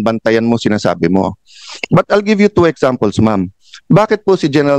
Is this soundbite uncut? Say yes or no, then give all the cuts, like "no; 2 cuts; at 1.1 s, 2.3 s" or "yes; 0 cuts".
yes; 0 cuts